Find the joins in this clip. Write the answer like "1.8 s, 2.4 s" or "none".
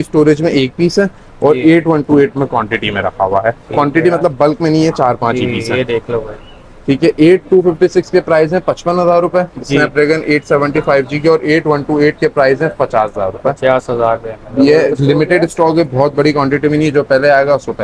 none